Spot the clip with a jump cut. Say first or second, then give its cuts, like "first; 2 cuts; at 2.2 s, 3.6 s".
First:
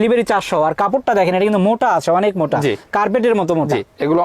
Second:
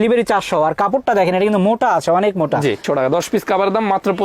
second; 1 cut; at 2.8 s